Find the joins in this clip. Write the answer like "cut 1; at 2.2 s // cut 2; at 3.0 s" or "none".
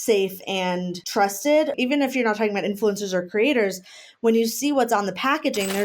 cut 1; at 1.0 s // cut 2; at 1.7 s